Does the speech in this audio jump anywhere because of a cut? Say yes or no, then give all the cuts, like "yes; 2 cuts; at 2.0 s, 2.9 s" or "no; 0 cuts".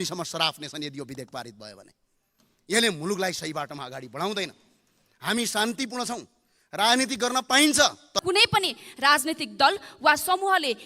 yes; 1 cut; at 8.2 s